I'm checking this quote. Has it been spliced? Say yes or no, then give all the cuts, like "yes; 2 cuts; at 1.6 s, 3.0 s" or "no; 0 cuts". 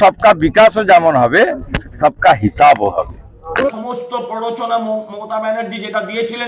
yes; 1 cut; at 3.8 s